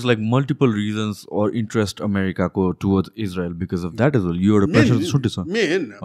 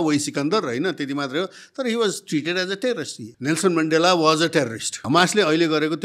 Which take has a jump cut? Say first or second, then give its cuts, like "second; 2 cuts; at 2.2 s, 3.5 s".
second; 2 cuts; at 3.2 s, 5.0 s